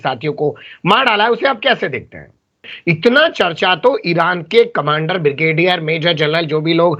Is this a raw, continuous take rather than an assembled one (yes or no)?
no